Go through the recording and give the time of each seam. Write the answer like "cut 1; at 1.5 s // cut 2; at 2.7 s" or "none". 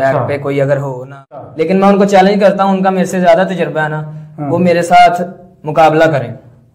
cut 1; at 1.5 s